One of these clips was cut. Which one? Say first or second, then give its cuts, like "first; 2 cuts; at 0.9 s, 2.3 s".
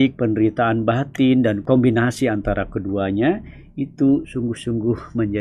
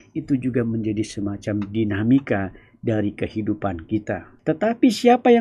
second; 1 cut; at 4.3 s